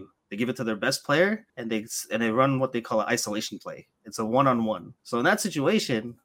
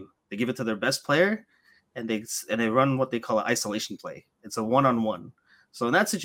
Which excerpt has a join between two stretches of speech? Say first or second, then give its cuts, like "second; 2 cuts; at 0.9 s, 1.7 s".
first; 2 cuts; at 1.5 s, 4.9 s